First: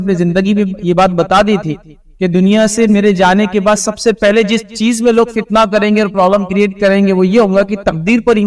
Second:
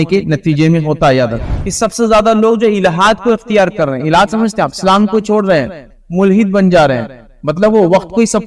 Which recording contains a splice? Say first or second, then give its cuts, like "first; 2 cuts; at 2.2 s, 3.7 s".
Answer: second; 1 cut; at 1.5 s